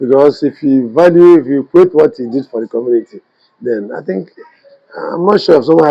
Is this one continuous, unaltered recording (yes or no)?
yes